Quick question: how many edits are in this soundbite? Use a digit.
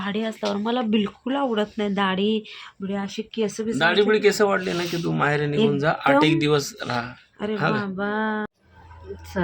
1